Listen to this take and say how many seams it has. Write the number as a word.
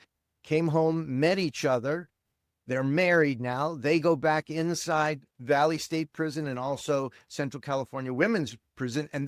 zero